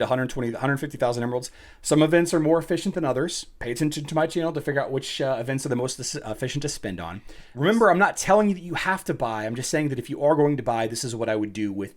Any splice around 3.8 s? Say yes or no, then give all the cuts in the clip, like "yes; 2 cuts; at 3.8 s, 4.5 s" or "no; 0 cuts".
no; 1 cut; at 7.5 s